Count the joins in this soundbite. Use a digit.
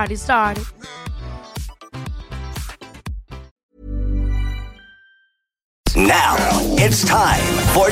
2